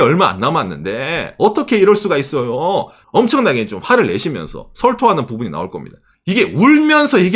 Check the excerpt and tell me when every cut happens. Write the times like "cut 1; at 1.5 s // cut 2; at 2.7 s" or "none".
cut 1; at 3.0 s // cut 2; at 6.0 s